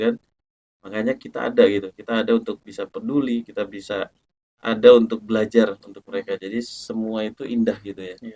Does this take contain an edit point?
no; 0 cuts

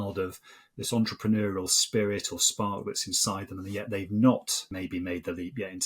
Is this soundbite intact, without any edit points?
no; 1 cut; at 4.6 s

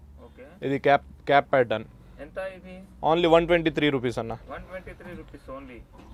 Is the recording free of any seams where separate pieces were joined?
yes; 0 cuts

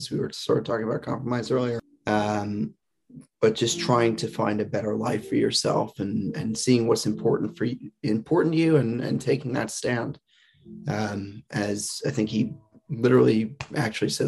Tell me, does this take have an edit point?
yes; 1 cut; at 1.8 s

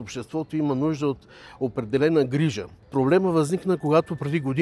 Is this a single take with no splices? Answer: no; 1 cut; at 2.8 s

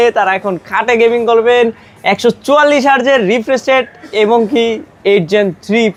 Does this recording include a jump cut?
no; 0 cuts

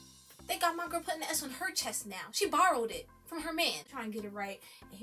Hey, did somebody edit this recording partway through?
yes; 1 cut; at 3.8 s

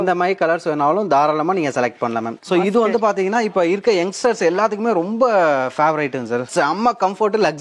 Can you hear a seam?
yes; 2 cuts; at 2.4 s, 6.5 s

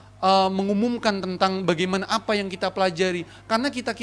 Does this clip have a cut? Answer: no; 0 cuts

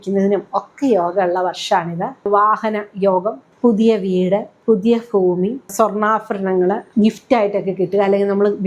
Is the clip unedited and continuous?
no; 5 cuts; at 2.3 s, 3.4 s, 4.5 s, 5.7 s, 6.9 s

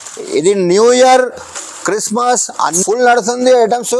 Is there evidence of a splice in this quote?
yes; 1 cut; at 2.8 s

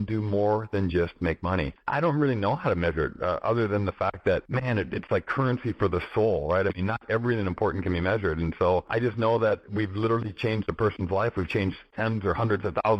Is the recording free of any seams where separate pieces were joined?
no; 5 cuts; at 1.8 s, 4.5 s, 8.9 s, 9.7 s, 11.8 s

